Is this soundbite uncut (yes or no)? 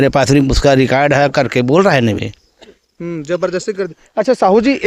yes